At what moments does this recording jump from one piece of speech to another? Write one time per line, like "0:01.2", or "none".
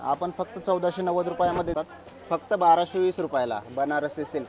0:01.7

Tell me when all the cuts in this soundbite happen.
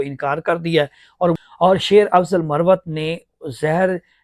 0:01.4

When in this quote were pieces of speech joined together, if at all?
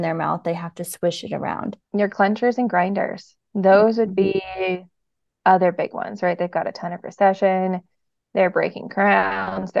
0:01.7

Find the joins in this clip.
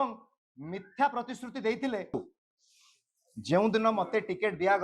0:02.1

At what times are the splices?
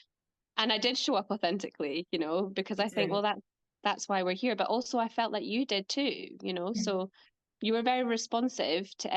none

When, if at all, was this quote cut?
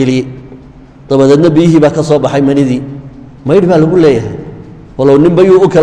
none

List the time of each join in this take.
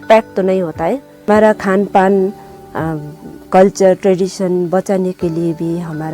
0:01.3

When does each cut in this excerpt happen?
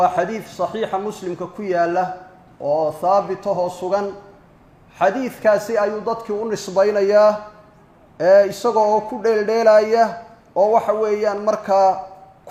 none

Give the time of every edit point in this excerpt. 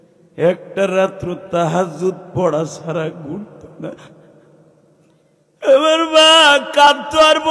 none

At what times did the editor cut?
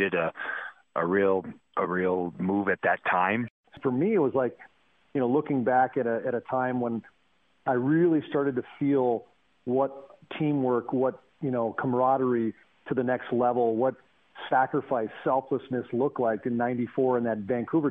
0:03.6

